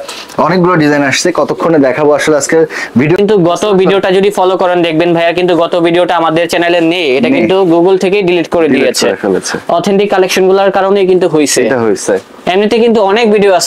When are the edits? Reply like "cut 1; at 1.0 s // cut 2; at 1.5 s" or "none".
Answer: cut 1; at 3.2 s